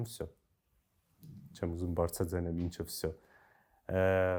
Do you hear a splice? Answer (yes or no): no